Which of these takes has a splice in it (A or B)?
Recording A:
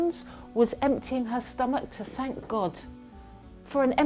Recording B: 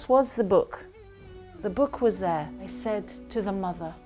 B